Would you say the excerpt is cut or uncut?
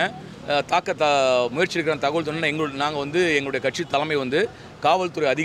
uncut